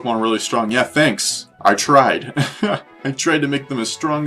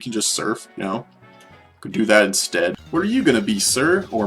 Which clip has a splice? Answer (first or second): second